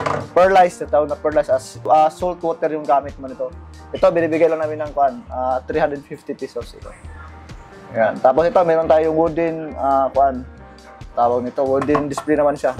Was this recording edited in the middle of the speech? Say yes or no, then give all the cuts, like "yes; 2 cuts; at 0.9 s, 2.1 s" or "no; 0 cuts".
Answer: no; 0 cuts